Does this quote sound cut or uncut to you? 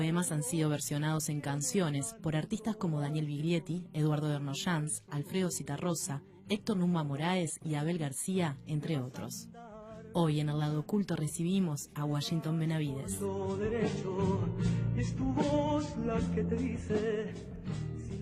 uncut